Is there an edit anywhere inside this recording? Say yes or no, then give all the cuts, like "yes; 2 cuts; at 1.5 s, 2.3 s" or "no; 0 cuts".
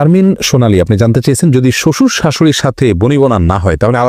no; 0 cuts